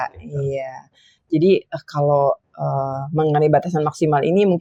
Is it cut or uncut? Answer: uncut